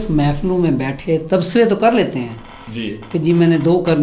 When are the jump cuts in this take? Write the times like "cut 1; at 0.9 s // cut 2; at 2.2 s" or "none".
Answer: none